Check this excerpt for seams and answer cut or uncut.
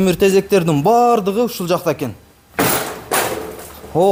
uncut